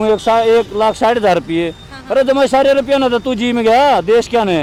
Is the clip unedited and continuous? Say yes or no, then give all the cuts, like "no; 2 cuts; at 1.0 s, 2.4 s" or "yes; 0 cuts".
yes; 0 cuts